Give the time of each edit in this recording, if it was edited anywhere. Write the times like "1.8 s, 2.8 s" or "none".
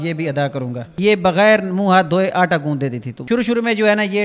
0.9 s, 3.1 s